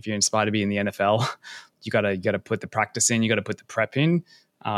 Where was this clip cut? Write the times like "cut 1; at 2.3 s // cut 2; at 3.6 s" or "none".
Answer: cut 1; at 1.7 s